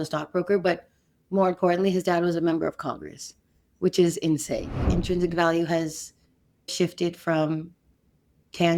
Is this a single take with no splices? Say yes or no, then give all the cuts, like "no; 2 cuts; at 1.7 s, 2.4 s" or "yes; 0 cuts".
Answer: no; 1 cut; at 4.8 s